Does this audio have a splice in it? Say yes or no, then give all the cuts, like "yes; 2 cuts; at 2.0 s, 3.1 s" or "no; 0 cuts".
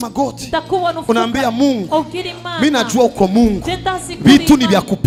no; 0 cuts